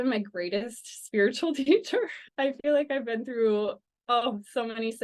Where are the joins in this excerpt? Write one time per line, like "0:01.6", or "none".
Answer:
0:02.2